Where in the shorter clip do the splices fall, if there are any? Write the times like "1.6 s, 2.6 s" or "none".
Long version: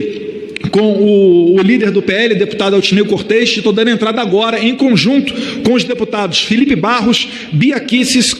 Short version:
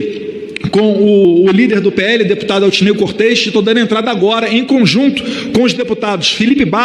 1.2 s